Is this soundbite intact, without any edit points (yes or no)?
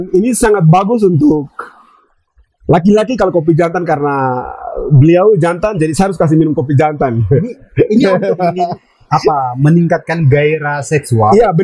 yes